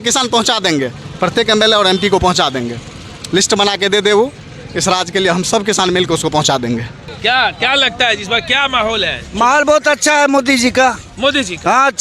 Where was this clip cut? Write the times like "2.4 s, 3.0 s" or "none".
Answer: 7.1 s